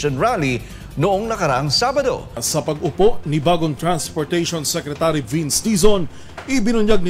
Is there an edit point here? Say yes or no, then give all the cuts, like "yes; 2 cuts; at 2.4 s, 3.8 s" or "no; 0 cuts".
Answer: yes; 1 cut; at 2.4 s